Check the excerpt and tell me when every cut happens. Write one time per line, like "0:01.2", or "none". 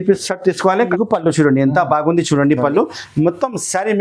0:00.9